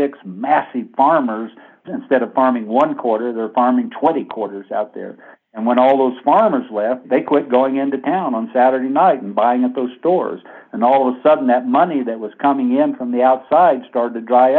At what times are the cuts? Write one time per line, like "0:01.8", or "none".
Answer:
0:01.7

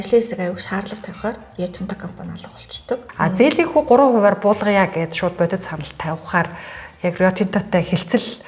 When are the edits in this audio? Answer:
0:03.0

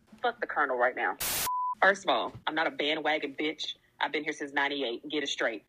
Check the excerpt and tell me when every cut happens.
0:01.2
0:02.4

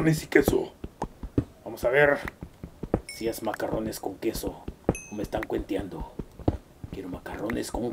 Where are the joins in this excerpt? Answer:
0:04.7

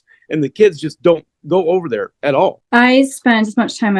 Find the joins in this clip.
0:02.6

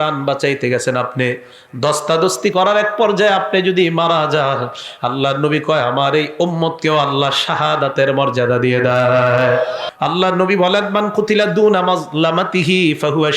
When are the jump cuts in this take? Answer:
0:09.8

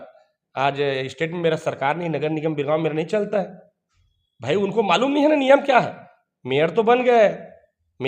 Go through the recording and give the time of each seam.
none

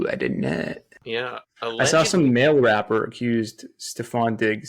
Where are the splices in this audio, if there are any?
0:01.4

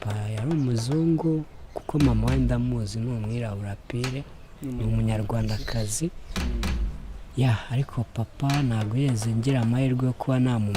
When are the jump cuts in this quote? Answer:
none

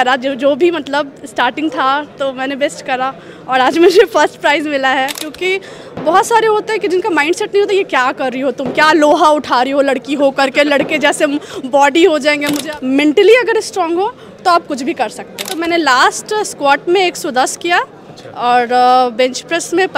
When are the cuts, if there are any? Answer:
0:05.3
0:12.6
0:15.5

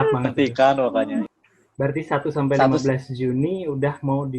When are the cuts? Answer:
0:01.3

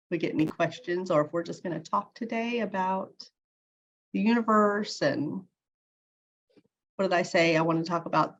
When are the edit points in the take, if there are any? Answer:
none

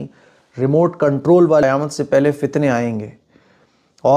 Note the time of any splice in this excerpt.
0:01.6

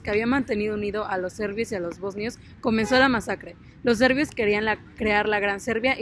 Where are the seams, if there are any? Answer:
none

